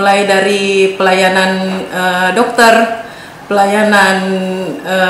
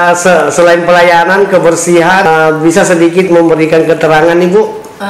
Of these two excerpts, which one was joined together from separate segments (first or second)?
second